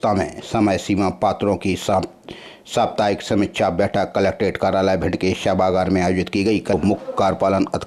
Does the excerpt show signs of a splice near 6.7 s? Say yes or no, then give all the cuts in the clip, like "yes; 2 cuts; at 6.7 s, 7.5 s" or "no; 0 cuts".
yes; 1 cut; at 6.7 s